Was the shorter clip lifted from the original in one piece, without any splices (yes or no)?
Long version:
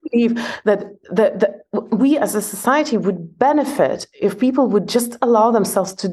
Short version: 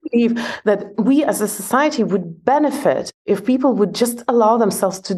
no